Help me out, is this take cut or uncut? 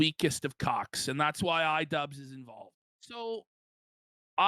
cut